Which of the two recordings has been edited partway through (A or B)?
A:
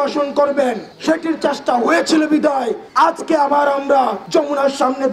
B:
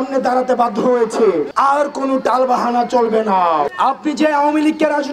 B